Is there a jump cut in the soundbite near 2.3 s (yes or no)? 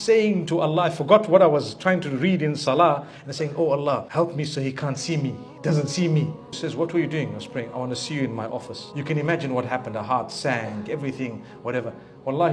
no